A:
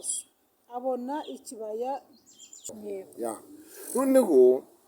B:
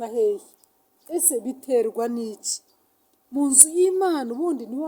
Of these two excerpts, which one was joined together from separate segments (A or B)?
A